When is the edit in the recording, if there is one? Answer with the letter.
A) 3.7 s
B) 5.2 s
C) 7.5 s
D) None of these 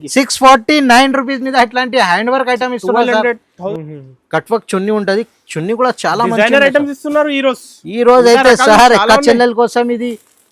A